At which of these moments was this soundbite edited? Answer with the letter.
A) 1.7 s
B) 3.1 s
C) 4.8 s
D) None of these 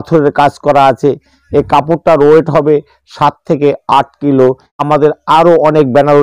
C